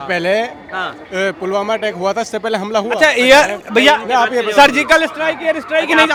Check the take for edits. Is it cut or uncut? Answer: uncut